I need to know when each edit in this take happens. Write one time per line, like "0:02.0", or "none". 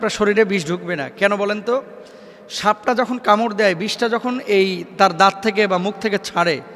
none